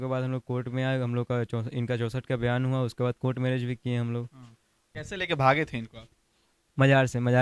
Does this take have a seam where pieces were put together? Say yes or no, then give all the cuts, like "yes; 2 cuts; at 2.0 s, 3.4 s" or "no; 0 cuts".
yes; 1 cut; at 4.9 s